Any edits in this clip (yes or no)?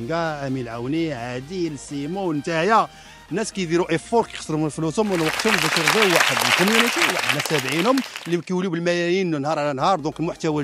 no